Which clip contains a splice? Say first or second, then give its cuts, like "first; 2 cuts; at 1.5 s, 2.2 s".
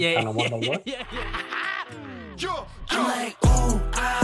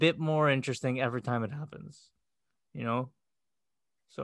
first; 1 cut; at 0.9 s